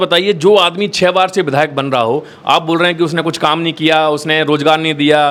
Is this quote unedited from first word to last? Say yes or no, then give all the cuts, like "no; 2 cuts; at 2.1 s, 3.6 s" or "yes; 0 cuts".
yes; 0 cuts